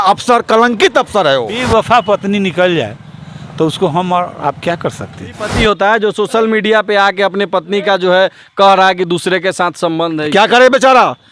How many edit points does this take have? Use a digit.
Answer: 2